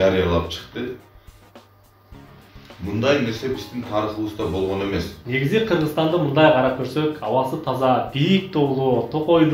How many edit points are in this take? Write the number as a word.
one